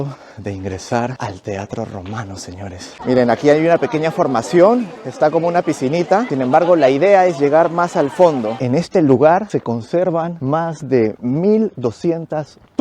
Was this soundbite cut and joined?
yes; 2 cuts; at 2.9 s, 8.5 s

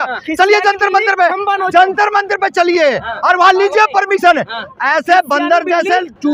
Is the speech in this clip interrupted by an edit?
no; 0 cuts

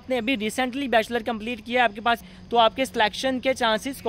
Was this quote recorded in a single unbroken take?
no; 1 cut; at 2.2 s

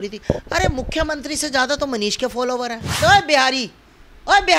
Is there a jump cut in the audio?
yes; 1 cut; at 3.0 s

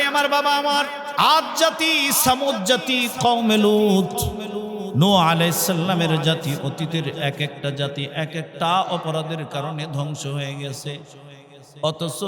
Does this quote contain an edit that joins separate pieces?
yes; 1 cut; at 1.0 s

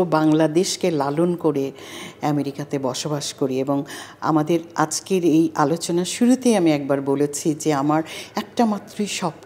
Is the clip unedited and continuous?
yes; 0 cuts

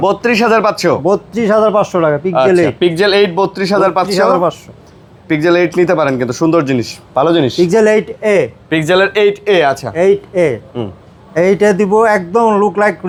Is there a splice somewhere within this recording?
no; 0 cuts

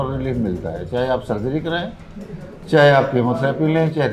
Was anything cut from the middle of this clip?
no; 0 cuts

